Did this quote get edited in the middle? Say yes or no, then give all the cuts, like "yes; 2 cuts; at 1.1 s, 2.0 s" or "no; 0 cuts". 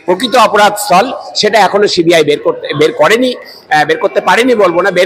no; 0 cuts